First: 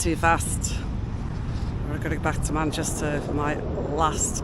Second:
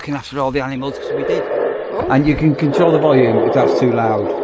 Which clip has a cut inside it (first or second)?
second